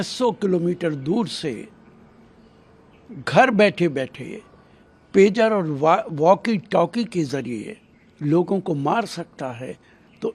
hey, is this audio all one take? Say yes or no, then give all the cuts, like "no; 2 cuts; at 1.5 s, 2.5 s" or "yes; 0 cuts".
yes; 0 cuts